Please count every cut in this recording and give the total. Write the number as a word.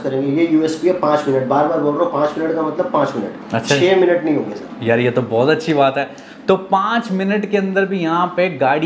zero